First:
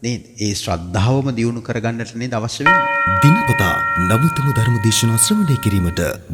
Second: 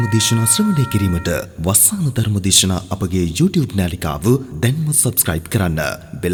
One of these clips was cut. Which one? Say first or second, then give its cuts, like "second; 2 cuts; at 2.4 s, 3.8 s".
first; 1 cut; at 2.7 s